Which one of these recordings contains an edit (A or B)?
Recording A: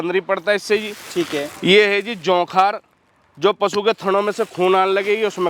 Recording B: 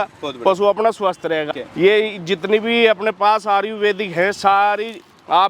B